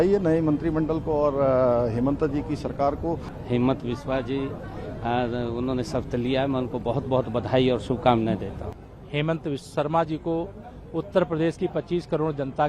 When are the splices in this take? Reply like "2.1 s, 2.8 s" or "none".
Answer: 3.3 s, 8.7 s

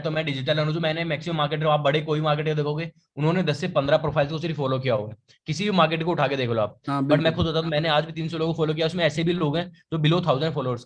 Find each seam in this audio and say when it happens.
none

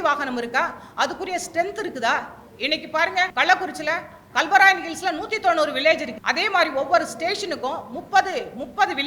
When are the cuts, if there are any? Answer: 3.3 s, 6.1 s

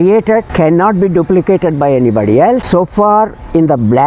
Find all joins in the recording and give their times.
2.6 s

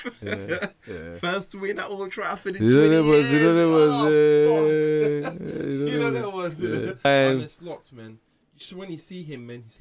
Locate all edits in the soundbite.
7.0 s

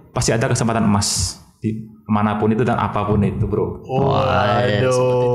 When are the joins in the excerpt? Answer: none

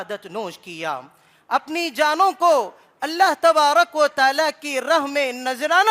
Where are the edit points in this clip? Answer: none

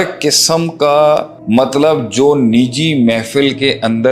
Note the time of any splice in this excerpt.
1.3 s

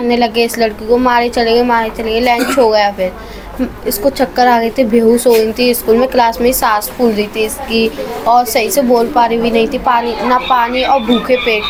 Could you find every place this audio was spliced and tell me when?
none

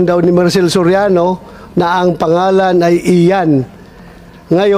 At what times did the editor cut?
none

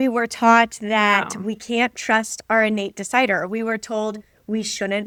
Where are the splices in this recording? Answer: none

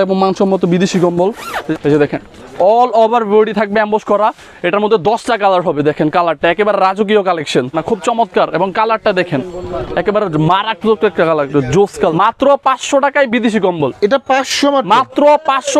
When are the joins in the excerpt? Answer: 1.7 s, 7.8 s, 12.1 s

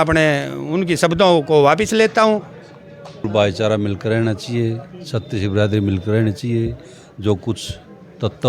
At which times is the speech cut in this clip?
3.2 s

